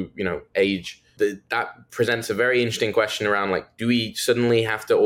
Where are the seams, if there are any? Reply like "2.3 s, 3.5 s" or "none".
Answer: 1.0 s